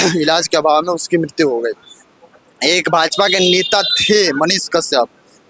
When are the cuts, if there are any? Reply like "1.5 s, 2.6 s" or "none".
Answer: none

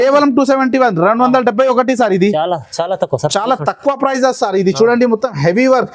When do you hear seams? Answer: none

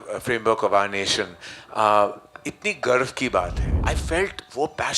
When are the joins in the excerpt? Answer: 3.7 s

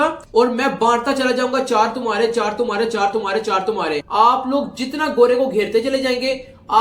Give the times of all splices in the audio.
4.0 s

